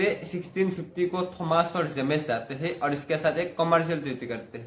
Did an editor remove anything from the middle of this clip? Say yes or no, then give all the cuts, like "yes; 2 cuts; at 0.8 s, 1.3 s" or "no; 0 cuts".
no; 0 cuts